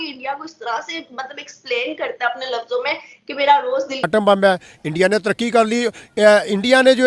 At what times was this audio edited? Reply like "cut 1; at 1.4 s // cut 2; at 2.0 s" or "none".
cut 1; at 4.1 s

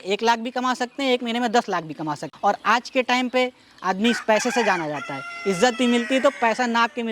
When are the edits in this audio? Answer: cut 1; at 2.3 s

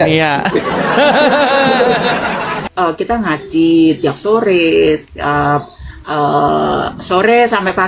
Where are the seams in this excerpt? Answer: cut 1; at 2.7 s

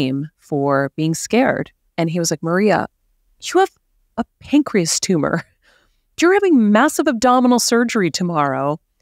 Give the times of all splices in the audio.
cut 1; at 1.9 s

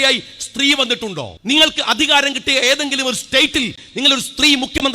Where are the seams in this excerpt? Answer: cut 1; at 1.3 s

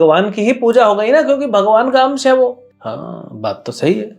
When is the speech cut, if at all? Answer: cut 1; at 2.7 s

